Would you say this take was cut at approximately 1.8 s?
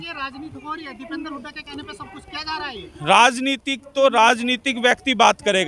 no; 0 cuts

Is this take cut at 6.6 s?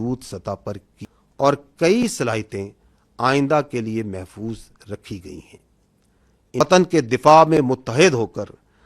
yes; 2 cuts; at 0.9 s, 6.6 s

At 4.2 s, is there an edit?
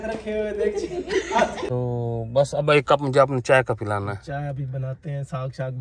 no; 1 cut; at 1.6 s

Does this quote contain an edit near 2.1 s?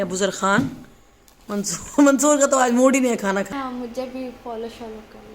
no; 1 cut; at 3.5 s

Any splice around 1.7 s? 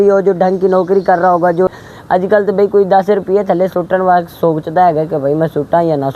yes; 1 cut; at 1.7 s

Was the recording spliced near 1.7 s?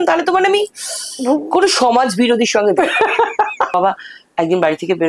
no; 1 cut; at 3.7 s

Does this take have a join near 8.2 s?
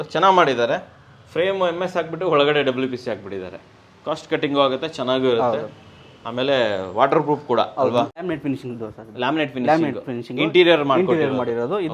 yes; 1 cut; at 8.2 s

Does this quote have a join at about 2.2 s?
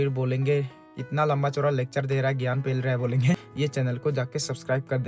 no; 1 cut; at 3.5 s

